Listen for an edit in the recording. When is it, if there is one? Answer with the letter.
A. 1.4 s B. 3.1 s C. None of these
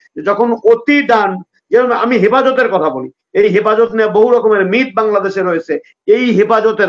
C